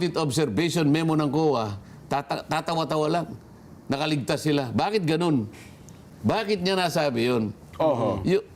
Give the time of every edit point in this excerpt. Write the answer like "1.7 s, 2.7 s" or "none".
6.1 s